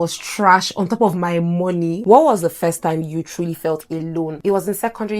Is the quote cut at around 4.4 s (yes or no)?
yes